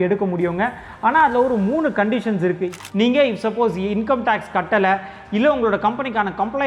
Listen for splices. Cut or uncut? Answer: cut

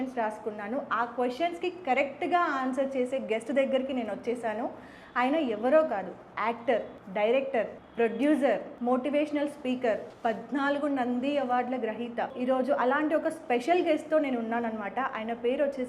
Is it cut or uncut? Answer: cut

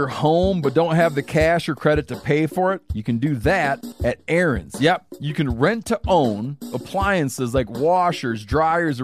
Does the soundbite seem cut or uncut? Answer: cut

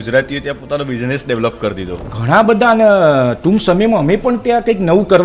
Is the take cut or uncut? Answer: uncut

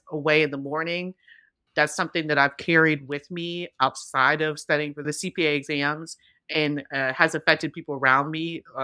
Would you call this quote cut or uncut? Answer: cut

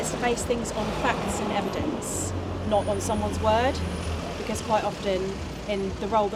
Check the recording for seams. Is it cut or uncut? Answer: uncut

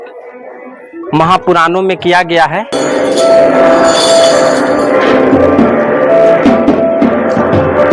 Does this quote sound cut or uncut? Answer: cut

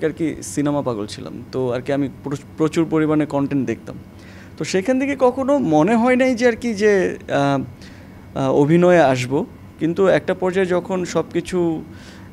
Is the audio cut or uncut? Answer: uncut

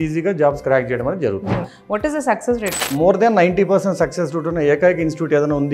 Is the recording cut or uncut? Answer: cut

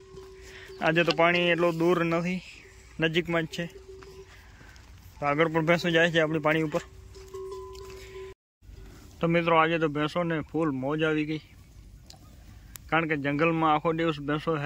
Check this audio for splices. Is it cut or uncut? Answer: cut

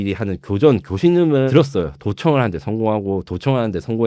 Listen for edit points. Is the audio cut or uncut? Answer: cut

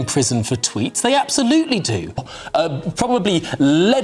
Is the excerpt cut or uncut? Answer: cut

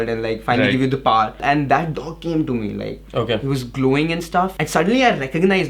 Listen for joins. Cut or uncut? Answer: cut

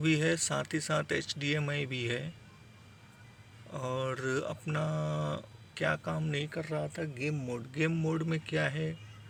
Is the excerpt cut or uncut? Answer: uncut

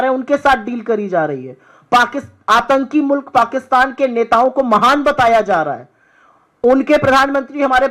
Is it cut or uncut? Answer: uncut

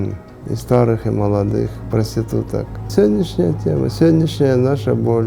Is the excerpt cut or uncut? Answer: uncut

